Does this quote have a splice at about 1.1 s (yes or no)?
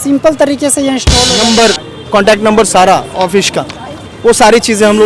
yes